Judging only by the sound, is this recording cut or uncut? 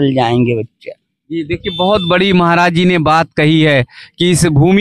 uncut